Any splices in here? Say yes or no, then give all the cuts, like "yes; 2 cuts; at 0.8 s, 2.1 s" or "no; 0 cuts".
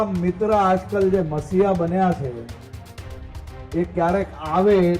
no; 0 cuts